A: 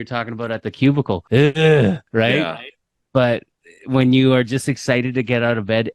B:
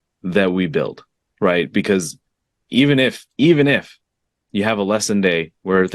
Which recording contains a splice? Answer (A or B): A